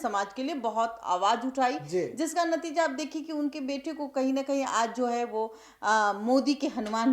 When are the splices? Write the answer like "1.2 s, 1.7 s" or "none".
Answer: none